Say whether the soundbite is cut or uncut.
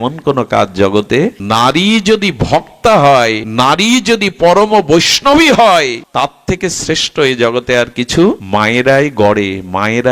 cut